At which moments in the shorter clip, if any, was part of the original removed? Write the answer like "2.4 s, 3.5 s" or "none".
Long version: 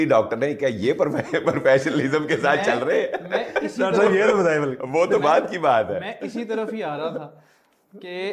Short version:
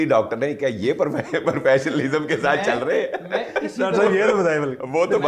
none